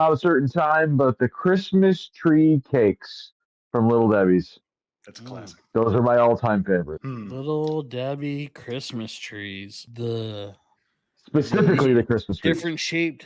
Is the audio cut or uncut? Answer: cut